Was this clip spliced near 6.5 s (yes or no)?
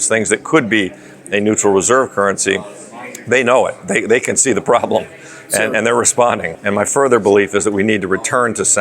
yes